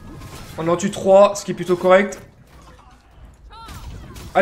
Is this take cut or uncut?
cut